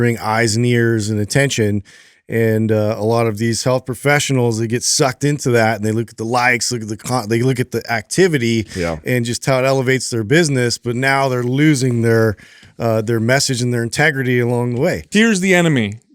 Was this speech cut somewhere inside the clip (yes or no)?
yes